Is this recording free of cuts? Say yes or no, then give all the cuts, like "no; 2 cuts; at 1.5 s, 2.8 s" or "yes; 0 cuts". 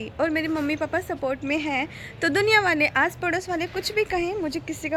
yes; 0 cuts